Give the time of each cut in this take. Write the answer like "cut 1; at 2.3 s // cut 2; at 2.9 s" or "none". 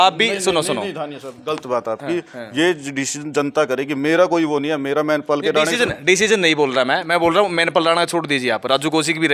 none

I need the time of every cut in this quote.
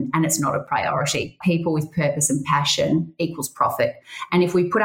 cut 1; at 1.4 s

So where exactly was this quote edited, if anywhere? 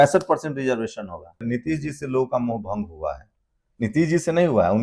cut 1; at 1.4 s

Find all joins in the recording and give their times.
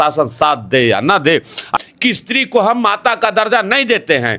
cut 1; at 1.7 s

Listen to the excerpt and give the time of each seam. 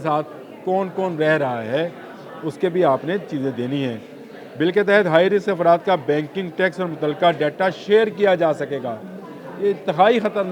none

